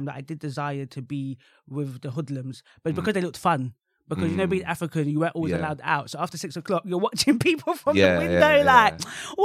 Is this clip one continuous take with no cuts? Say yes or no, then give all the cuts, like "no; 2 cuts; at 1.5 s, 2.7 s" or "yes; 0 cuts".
yes; 0 cuts